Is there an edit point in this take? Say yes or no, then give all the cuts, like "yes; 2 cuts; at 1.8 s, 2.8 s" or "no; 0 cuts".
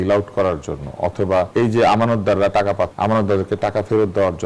yes; 2 cuts; at 1.5 s, 2.9 s